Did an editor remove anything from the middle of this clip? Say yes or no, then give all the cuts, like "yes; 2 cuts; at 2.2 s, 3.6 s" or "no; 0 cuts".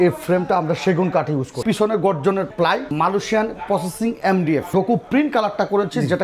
yes; 3 cuts; at 1.6 s, 2.9 s, 4.7 s